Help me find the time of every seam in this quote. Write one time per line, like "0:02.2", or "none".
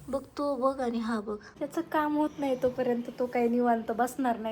0:01.6